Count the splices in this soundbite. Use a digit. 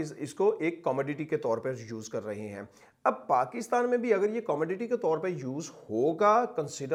0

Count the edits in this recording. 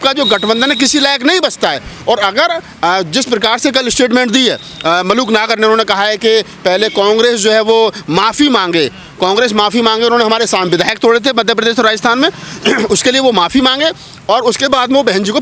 0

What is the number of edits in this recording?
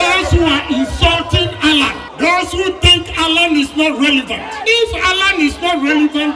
2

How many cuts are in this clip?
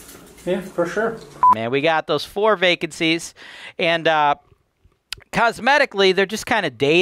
1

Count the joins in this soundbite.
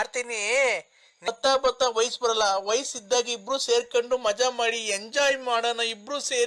1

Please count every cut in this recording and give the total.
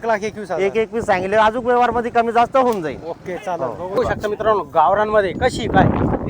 1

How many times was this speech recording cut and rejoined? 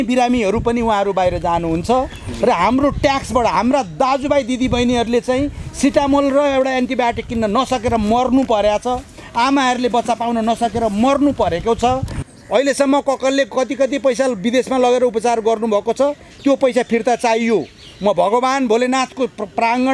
1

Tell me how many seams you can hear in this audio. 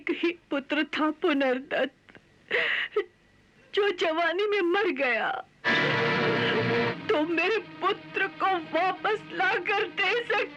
1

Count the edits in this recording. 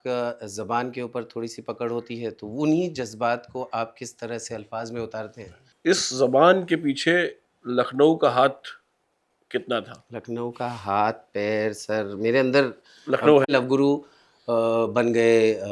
2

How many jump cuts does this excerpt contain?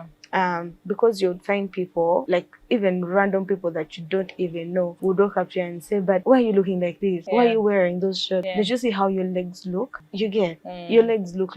6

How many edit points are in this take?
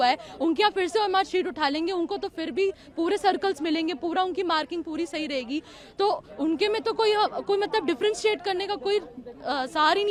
0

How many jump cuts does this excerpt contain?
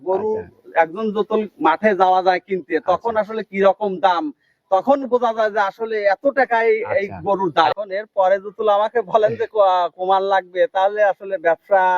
1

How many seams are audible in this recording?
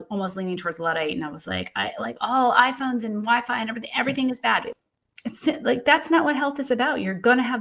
1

